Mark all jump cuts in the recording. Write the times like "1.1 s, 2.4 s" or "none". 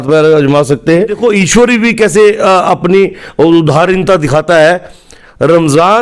1.1 s